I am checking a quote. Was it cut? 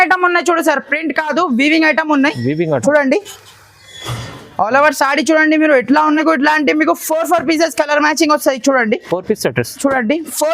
yes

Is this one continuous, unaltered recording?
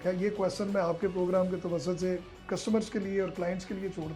yes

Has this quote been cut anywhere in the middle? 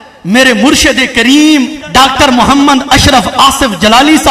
yes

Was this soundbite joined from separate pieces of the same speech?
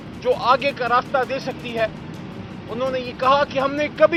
no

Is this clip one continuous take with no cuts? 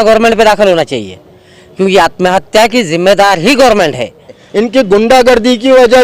no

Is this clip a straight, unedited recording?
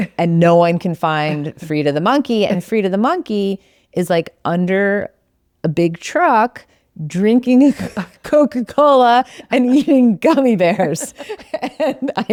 yes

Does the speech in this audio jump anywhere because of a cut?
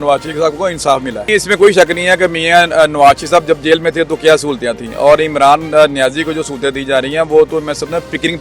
yes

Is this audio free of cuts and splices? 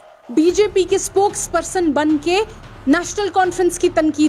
yes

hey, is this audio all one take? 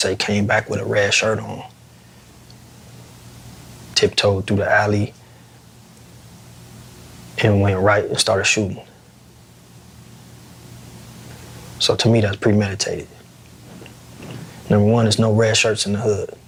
yes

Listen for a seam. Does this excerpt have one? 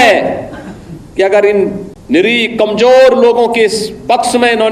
yes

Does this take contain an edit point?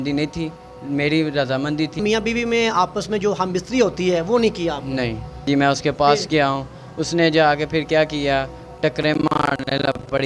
yes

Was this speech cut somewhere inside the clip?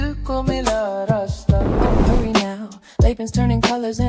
yes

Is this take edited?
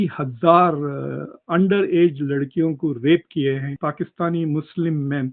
yes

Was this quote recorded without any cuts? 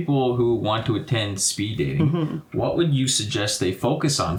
yes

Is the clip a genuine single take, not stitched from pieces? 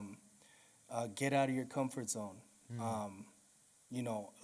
yes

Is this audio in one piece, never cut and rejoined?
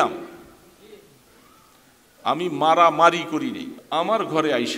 no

